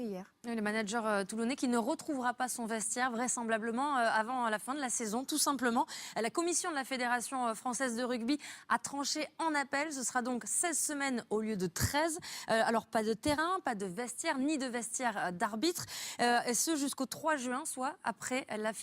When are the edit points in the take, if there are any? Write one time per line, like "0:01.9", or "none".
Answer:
0:03.3